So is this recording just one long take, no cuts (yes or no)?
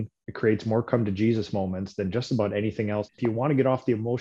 no